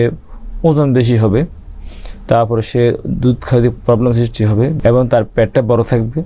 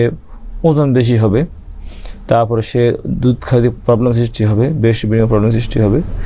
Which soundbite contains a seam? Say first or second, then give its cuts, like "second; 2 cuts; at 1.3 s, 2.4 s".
first; 1 cut; at 4.7 s